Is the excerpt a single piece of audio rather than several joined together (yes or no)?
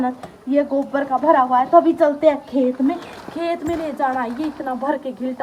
yes